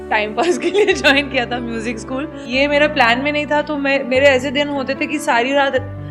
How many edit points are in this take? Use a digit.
1